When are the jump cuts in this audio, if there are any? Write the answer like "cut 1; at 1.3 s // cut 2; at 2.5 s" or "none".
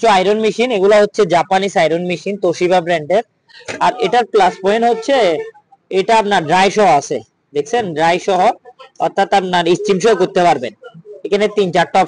none